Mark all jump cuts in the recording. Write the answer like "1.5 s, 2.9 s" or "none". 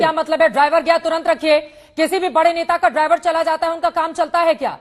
none